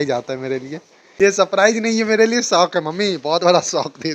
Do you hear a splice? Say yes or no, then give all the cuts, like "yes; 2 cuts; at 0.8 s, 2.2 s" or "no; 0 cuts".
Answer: yes; 1 cut; at 1.0 s